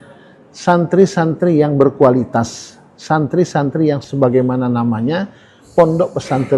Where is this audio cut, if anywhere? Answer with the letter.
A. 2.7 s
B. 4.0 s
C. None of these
B